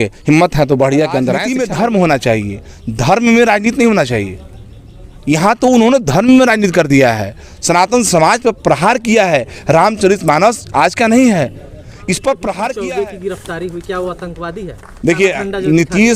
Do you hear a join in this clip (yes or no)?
yes